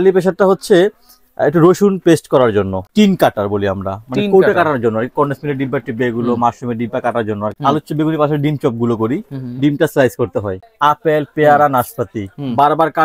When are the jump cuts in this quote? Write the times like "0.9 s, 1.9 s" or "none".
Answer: 2.8 s, 7.6 s, 10.6 s